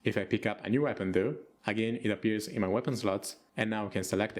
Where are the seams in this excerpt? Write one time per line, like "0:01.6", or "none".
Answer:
none